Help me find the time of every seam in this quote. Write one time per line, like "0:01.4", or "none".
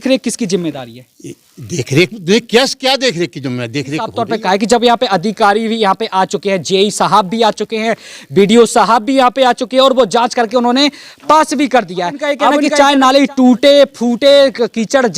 0:04.1
0:12.6